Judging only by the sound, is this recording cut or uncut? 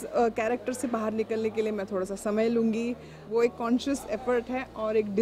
cut